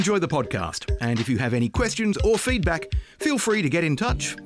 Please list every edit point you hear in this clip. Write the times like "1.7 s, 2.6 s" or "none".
none

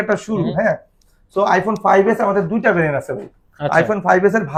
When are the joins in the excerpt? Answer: none

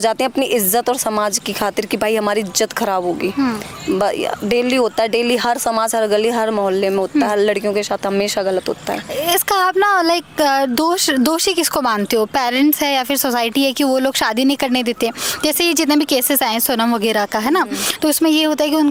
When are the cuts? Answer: none

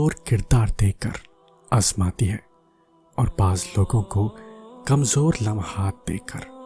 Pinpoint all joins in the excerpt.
none

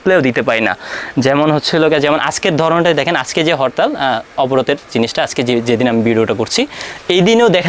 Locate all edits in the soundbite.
none

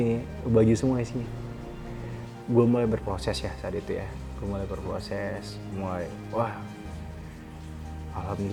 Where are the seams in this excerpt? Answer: none

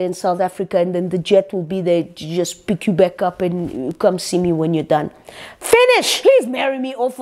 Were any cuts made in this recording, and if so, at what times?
6.1 s

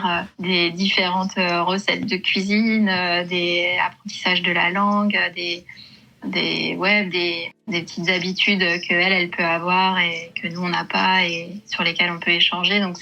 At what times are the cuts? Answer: none

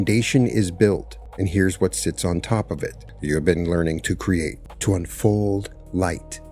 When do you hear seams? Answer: 1.2 s, 3.1 s, 4.7 s

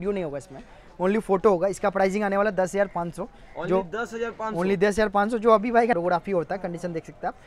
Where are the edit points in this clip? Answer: 5.9 s

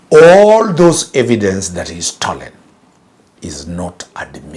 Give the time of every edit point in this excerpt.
none

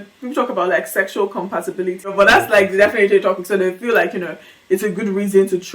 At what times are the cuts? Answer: 2.1 s

